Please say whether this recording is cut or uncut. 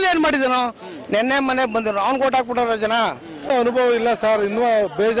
cut